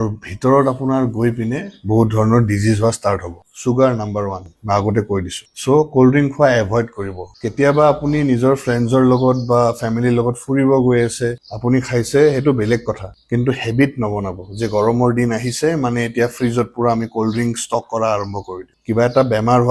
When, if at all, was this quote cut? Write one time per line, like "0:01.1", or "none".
none